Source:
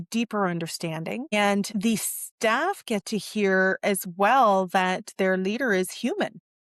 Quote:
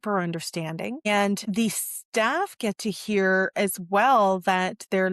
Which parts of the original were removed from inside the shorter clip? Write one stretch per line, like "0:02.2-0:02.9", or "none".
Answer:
none